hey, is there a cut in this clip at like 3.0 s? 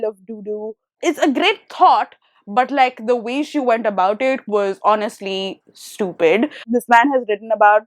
no; 2 cuts; at 0.9 s, 6.6 s

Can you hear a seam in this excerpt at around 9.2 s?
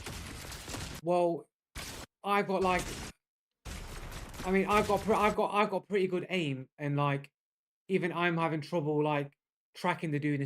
no; 1 cut; at 1.0 s

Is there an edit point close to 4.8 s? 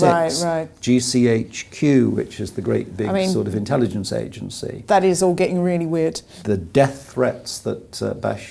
no; 1 cut; at 6.3 s

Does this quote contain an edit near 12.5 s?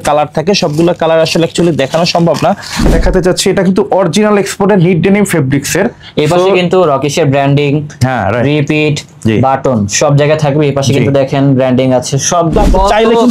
yes; 2 cuts; at 2.8 s, 12.5 s

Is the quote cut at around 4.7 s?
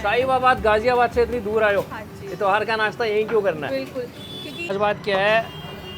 yes; 1 cut; at 4.7 s

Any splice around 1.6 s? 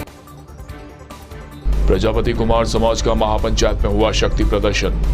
yes; 1 cut; at 1.6 s

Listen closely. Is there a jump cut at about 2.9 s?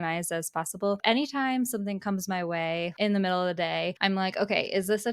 yes; 3 cuts; at 1.0 s, 2.9 s, 3.9 s

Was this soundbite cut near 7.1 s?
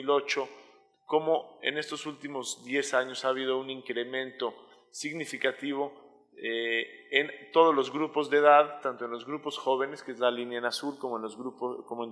yes; 1 cut; at 7.1 s

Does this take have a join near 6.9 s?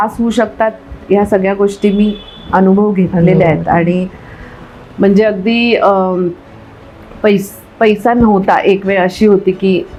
no; 0 cuts

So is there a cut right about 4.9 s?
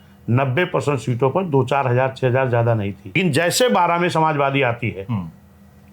no; 1 cut; at 3.1 s

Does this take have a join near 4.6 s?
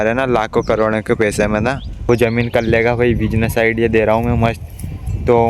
no; 1 cut; at 2.1 s

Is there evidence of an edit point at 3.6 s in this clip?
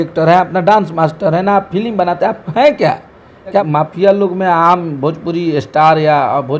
yes; 1 cut; at 3.6 s

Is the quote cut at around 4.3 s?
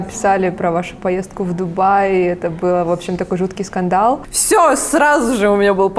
yes; 1 cut; at 4.3 s

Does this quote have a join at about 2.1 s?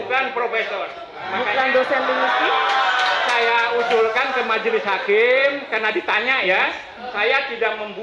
no; 0 cuts

